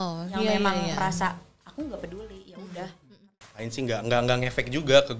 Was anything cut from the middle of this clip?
yes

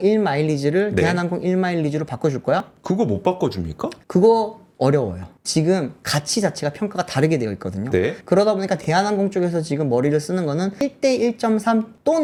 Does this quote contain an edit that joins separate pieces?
no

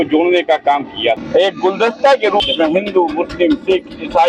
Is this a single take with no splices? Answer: no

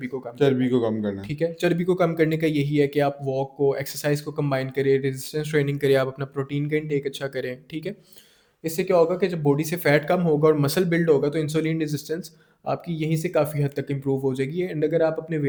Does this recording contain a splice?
no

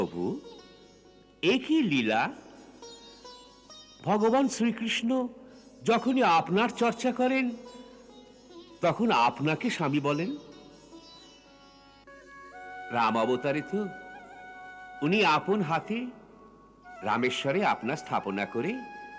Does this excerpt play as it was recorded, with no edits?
yes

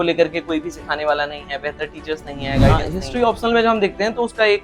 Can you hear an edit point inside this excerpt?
yes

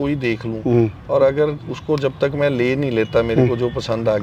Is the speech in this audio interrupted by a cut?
no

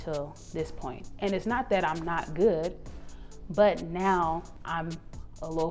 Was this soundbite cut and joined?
yes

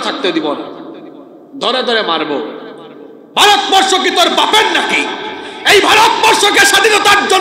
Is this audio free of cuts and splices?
yes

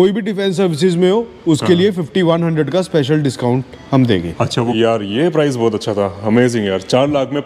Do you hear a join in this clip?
yes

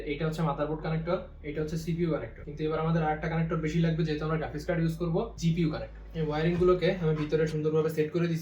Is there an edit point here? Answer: yes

